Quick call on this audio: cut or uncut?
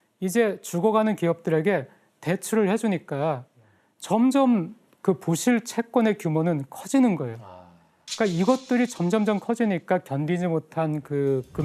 uncut